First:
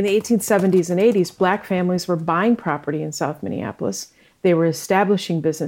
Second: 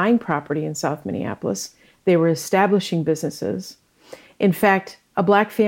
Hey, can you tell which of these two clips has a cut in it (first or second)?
first